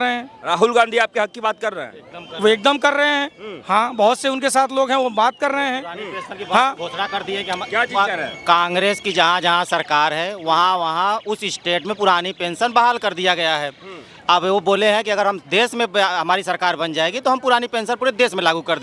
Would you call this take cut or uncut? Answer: uncut